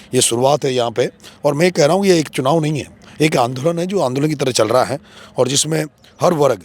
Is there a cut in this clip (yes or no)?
no